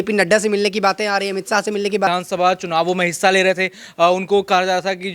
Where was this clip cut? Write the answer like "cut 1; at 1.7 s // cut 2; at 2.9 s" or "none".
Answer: cut 1; at 2.1 s